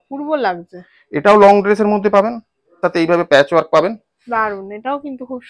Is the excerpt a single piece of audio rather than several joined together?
no; 1 cut; at 2.7 s

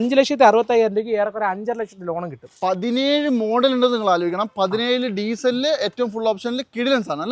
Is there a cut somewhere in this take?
no; 0 cuts

